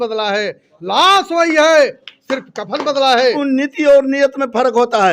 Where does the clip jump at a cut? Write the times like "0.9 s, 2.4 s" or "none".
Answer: 3.4 s